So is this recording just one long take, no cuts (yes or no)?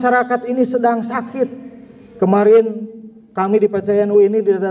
yes